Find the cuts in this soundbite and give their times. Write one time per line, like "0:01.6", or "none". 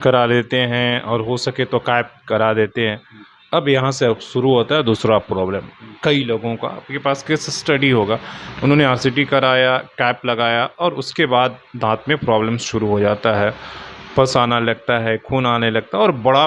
none